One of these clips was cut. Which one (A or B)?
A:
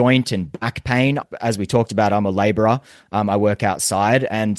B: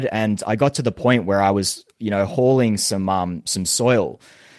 A